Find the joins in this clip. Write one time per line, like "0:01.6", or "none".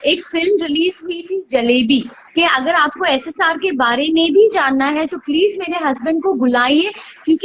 0:02.2